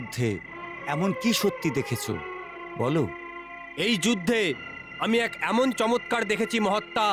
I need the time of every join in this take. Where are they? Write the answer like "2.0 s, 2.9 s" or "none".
none